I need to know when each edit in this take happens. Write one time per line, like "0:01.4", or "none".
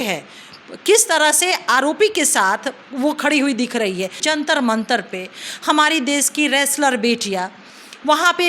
0:04.2

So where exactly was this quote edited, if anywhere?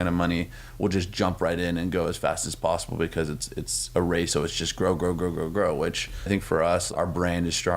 0:04.3
0:06.3
0:06.9

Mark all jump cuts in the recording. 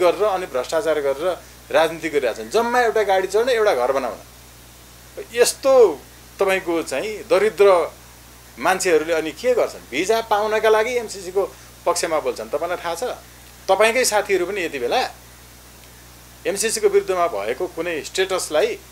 none

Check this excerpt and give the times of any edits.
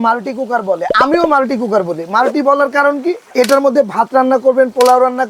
0:03.2

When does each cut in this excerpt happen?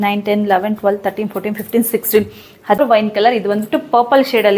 0:02.8

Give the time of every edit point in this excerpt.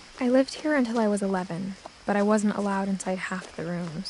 none

